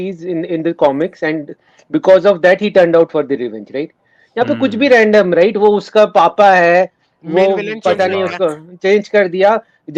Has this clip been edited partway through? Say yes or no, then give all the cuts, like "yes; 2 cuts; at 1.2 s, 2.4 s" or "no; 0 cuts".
no; 0 cuts